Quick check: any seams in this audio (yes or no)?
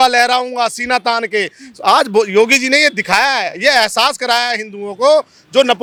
no